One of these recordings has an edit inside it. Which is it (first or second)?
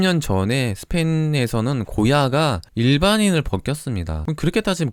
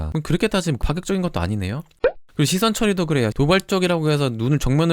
second